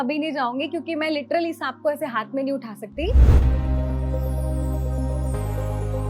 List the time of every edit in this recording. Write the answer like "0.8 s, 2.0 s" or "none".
3.3 s